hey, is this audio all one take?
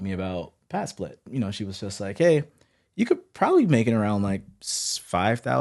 no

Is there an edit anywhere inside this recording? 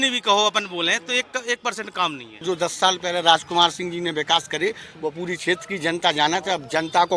yes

